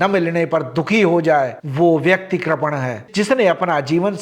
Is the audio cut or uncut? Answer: cut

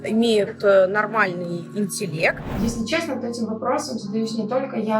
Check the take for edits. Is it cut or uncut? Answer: cut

